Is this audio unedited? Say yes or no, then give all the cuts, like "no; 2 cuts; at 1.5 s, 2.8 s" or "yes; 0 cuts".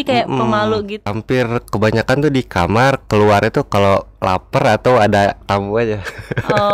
no; 1 cut; at 0.9 s